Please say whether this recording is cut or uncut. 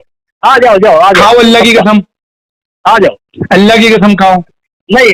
uncut